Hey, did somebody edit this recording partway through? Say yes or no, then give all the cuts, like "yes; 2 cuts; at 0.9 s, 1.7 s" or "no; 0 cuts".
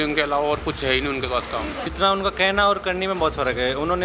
yes; 1 cut; at 1.8 s